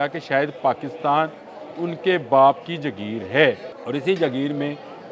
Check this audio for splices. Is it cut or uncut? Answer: cut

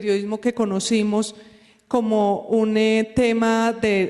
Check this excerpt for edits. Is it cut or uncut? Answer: cut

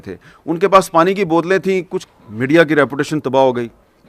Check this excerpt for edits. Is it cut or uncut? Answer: cut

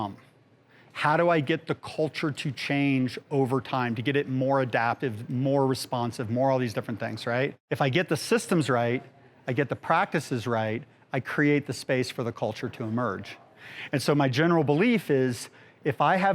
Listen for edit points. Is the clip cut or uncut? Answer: cut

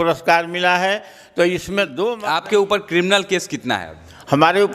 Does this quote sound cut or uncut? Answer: cut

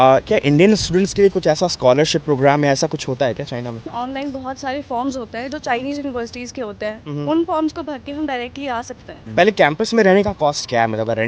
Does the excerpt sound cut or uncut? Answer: cut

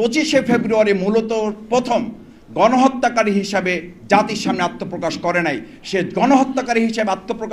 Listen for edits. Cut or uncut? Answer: uncut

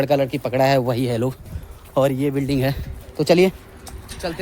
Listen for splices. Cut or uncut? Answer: uncut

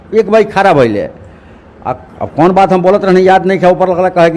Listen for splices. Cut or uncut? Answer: uncut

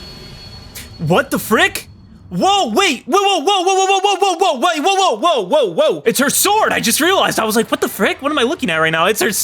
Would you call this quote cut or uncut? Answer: cut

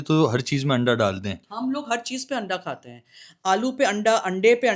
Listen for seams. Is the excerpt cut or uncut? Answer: uncut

